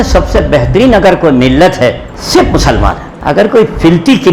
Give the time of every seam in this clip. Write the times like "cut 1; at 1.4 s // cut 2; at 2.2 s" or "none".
cut 1; at 3.2 s